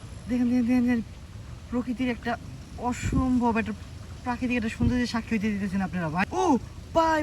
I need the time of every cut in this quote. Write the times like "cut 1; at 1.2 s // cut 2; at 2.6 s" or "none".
cut 1; at 6.2 s